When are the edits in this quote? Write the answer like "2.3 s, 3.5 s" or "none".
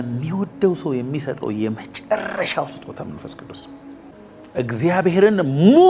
4.1 s